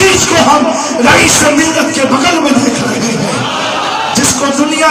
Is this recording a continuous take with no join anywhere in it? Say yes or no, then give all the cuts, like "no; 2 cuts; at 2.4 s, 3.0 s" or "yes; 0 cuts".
yes; 0 cuts